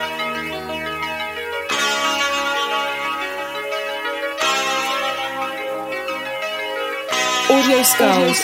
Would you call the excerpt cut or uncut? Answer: uncut